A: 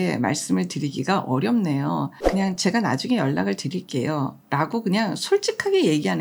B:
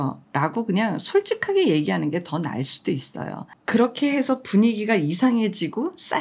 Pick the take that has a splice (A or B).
A